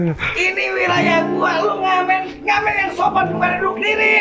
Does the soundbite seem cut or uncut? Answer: uncut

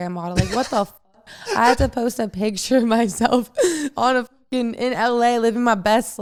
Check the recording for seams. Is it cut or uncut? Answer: uncut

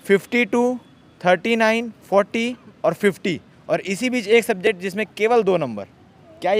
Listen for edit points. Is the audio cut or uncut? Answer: uncut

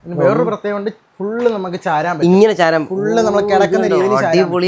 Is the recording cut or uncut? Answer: uncut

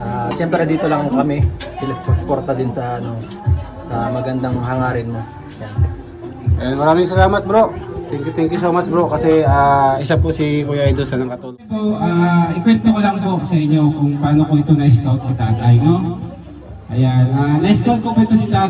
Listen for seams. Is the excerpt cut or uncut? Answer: cut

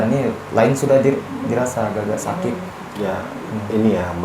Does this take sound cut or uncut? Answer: cut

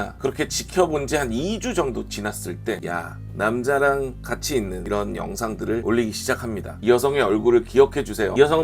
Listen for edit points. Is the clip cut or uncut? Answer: cut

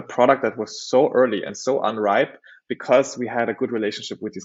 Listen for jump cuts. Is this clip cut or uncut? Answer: uncut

